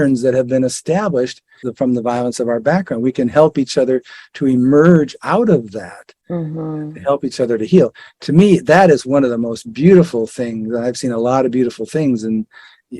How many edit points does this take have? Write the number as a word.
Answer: one